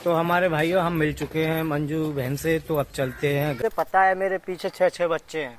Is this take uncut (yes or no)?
no